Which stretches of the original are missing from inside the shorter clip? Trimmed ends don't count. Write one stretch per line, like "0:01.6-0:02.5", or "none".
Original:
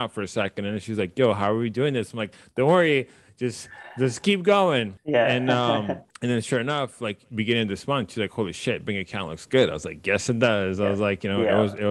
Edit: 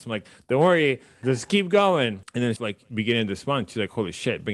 0:03.2-0:03.8
0:05.0-0:06.7